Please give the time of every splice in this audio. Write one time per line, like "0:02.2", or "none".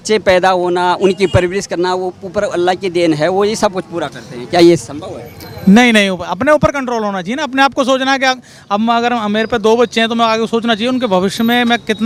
none